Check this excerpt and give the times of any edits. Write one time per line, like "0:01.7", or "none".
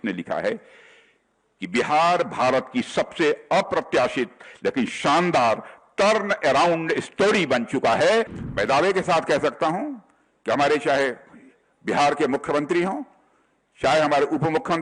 0:08.4